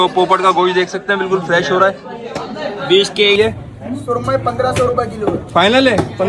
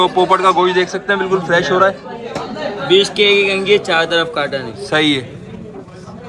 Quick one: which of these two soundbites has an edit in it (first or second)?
first